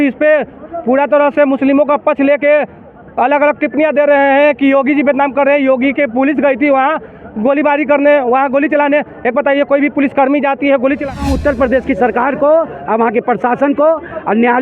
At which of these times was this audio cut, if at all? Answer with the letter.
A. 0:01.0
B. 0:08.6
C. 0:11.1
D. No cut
C